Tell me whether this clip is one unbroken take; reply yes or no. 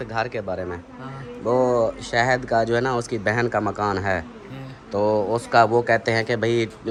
yes